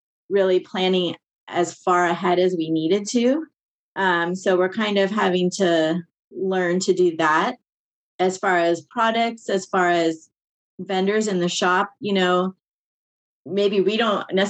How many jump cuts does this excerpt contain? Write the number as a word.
zero